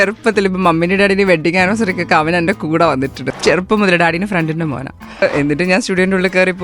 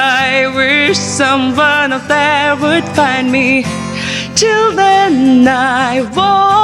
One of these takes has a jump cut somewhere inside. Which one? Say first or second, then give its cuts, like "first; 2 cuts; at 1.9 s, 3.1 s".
first; 2 cuts; at 3.2 s, 5.2 s